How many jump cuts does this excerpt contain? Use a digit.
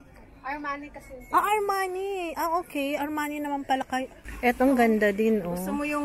1